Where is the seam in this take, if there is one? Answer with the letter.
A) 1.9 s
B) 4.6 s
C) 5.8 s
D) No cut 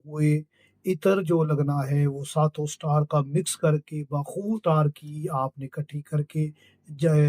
B